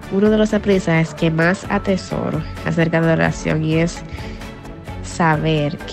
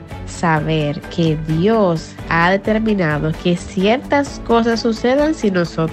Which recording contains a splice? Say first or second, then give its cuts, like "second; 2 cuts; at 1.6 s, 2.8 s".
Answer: second; 1 cut; at 2.1 s